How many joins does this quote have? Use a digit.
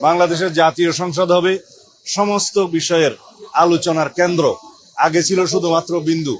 0